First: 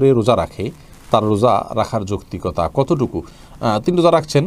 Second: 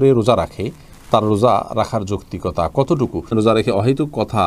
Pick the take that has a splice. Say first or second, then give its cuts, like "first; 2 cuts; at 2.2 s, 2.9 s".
second; 1 cut; at 3.3 s